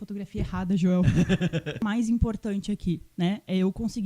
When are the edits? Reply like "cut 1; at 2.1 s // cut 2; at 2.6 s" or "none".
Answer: cut 1; at 1.8 s

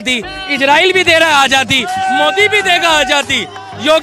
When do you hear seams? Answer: none

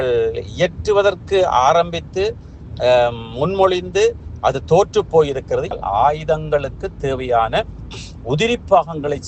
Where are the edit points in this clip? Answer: cut 1; at 5.7 s

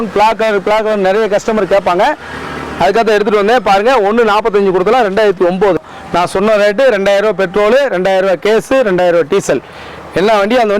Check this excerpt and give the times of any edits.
cut 1; at 5.8 s

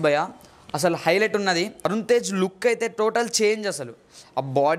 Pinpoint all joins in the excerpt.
cut 1; at 1.9 s

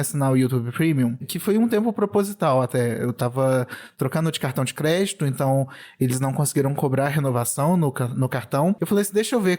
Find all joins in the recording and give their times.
cut 1; at 1.2 s

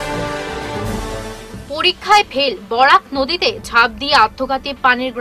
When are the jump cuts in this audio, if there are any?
cut 1; at 1.0 s

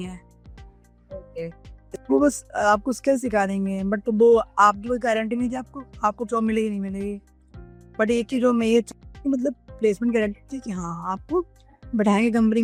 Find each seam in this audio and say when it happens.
none

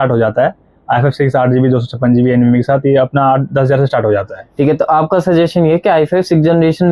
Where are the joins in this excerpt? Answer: none

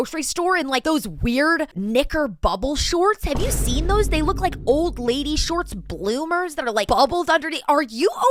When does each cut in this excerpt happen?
none

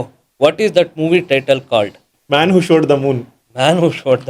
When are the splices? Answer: none

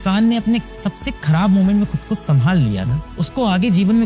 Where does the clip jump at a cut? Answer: none

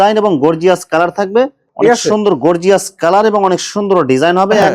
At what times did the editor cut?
cut 1; at 1.6 s

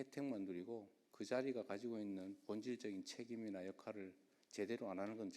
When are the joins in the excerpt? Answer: cut 1; at 1.0 s

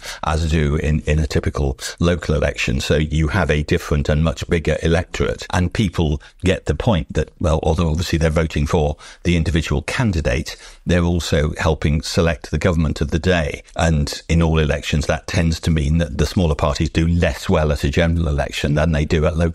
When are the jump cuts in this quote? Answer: cut 1; at 14.0 s // cut 2; at 16.1 s

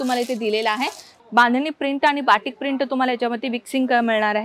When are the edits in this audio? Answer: cut 1; at 1.1 s

